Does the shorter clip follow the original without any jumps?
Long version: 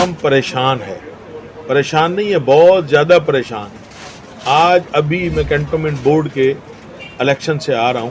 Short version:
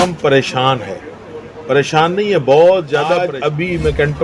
no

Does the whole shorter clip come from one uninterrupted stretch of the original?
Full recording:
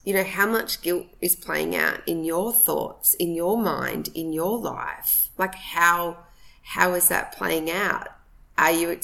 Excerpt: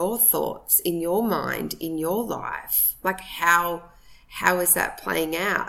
yes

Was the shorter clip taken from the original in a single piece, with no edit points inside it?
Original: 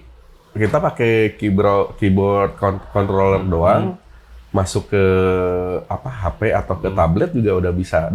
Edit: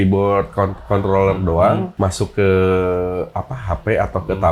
no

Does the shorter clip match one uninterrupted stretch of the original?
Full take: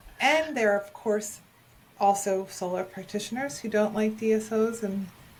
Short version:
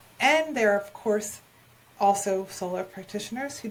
yes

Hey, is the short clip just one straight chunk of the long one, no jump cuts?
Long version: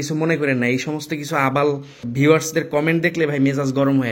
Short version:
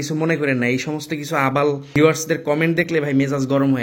no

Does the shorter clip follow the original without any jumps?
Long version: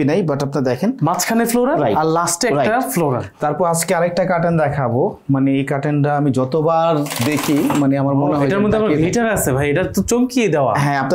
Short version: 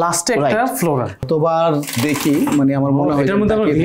no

